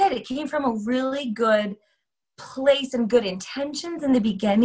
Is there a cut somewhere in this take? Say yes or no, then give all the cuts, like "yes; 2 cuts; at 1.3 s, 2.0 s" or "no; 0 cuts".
no; 0 cuts